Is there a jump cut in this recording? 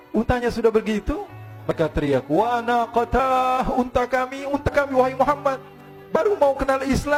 no; 0 cuts

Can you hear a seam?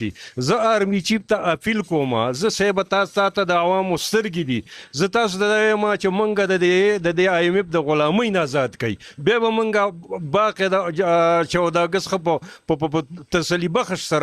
no; 0 cuts

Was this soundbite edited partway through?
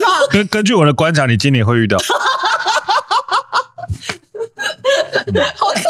yes; 1 cut; at 2.0 s

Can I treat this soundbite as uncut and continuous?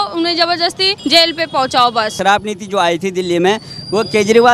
no; 2 cuts; at 0.9 s, 2.2 s

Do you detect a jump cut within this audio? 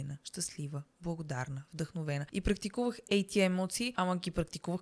yes; 2 cuts; at 2.3 s, 3.9 s

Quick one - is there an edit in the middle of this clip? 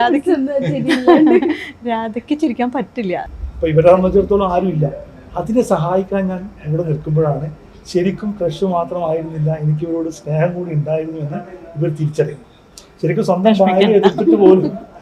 yes; 1 cut; at 3.3 s

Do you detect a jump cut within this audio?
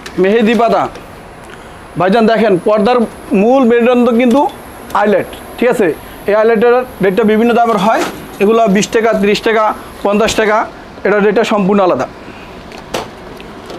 no; 0 cuts

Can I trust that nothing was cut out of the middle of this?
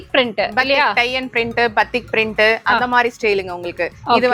yes; 0 cuts

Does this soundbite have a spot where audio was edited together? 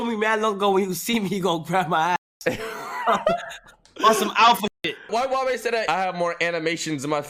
yes; 2 cuts; at 5.1 s, 5.9 s

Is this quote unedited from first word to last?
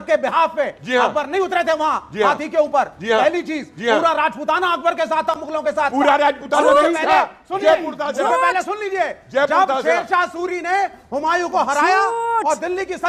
yes; 0 cuts

